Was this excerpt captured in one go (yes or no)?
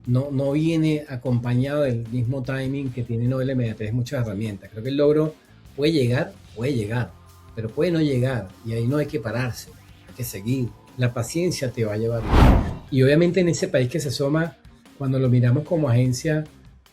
no